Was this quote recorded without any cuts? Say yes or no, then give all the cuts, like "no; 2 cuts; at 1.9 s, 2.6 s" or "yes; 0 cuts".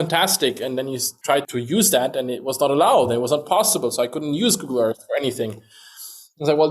no; 1 cut; at 1.3 s